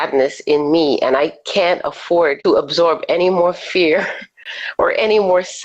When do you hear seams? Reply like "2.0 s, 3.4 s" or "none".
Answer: 2.4 s